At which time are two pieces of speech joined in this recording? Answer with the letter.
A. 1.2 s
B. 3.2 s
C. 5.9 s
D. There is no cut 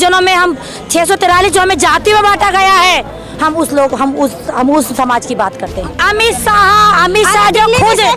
C